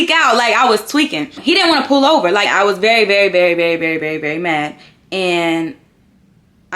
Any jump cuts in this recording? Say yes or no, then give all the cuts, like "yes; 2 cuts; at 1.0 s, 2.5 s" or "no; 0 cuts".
yes; 2 cuts; at 1.3 s, 2.5 s